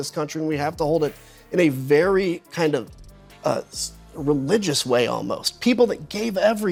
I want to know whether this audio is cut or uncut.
uncut